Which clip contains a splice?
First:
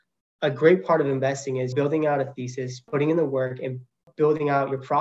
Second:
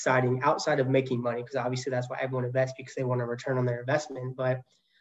first; 3 cuts; at 1.7 s, 2.7 s, 4.1 s

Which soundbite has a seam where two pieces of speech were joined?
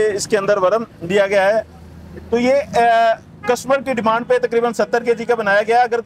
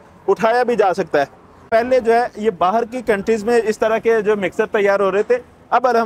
second; 1 cut; at 1.7 s

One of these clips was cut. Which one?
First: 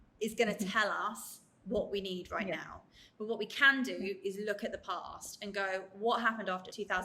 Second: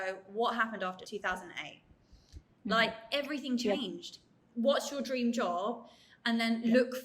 second; 1 cut; at 4.3 s

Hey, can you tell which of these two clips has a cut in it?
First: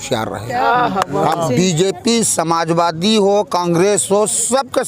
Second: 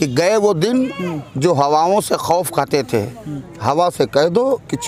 first; 1 cut; at 1.5 s

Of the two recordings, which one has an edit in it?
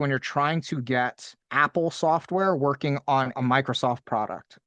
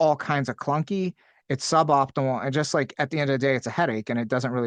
first; 2 cuts; at 1.4 s, 3.3 s

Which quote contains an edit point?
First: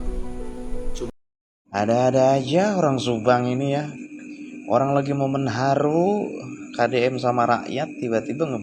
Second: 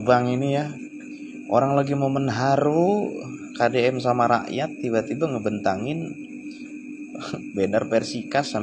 first; 1 cut; at 1.1 s

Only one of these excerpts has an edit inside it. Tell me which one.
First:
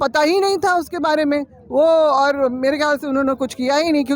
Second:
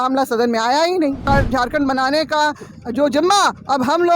second; 1 cut; at 1.2 s

